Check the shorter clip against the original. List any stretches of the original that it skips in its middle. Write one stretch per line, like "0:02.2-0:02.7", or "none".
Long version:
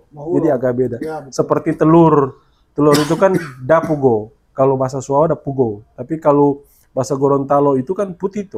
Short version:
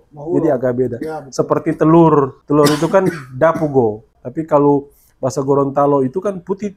0:02.4-0:02.7
0:04.4-0:05.9

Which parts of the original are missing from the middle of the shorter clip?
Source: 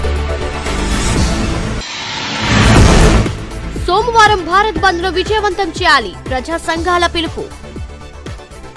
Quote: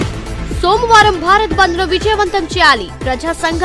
none

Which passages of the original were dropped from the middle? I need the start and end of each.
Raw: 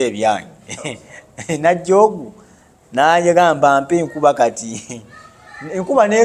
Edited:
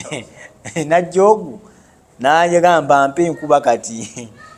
none

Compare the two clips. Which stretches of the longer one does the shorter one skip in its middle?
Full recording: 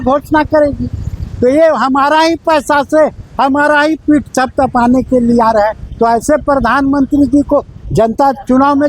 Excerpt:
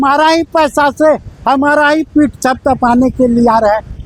none

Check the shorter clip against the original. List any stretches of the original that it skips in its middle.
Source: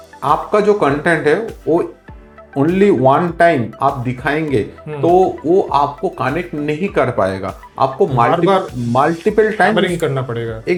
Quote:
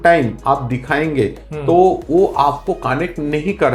none

